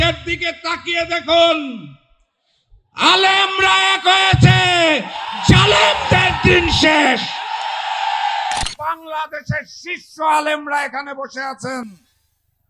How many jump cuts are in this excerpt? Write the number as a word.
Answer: one